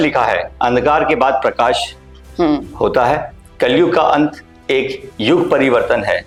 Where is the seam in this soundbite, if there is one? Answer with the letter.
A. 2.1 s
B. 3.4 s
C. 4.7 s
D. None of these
D